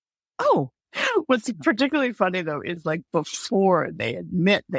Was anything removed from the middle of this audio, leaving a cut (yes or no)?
no